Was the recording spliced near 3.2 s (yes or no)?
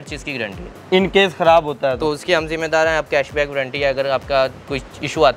no